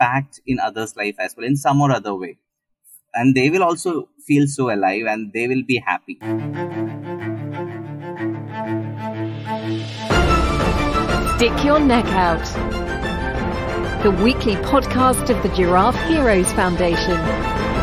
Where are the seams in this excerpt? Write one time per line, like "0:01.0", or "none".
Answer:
0:06.1